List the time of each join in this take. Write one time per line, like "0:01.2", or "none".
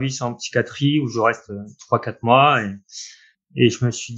0:03.1